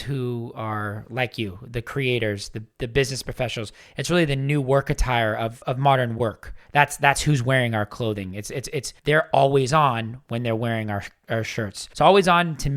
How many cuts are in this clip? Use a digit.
3